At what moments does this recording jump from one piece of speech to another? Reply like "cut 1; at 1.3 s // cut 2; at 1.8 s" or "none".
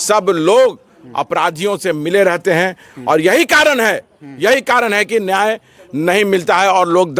none